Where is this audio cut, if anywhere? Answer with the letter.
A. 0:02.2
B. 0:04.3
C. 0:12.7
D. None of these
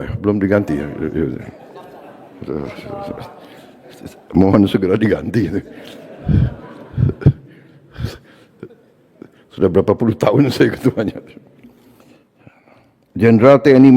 C